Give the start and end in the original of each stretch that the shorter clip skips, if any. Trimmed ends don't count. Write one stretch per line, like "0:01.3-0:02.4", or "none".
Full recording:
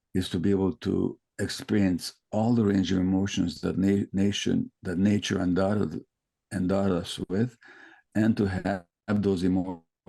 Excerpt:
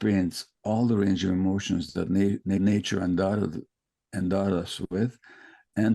0:04.2-0:05.0